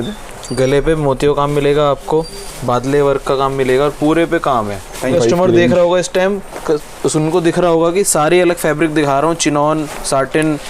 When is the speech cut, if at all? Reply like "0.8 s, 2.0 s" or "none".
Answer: 5.1 s